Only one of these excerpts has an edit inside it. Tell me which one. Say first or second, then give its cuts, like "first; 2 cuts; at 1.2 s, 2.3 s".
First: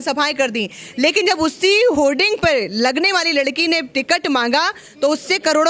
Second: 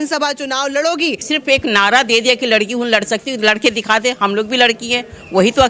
second; 1 cut; at 1.3 s